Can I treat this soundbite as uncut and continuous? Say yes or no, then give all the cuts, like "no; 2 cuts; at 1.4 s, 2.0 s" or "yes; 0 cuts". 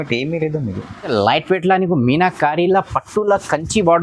no; 1 cut; at 1.1 s